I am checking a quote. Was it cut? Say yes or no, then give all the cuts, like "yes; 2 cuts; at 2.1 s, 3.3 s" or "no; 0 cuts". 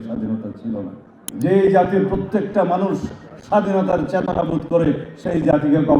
yes; 1 cut; at 1.3 s